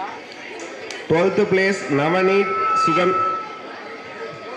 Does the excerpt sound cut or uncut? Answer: uncut